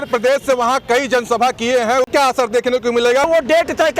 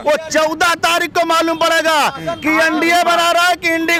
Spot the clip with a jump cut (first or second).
first